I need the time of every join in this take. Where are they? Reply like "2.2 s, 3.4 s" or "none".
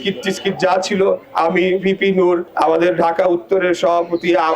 1.3 s, 2.5 s